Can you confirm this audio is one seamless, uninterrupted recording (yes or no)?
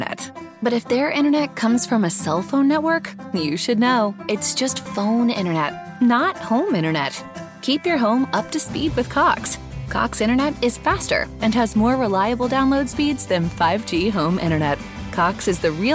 yes